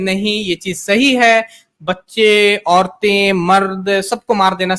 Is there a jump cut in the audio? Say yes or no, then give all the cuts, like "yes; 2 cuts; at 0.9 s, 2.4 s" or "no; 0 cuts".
no; 0 cuts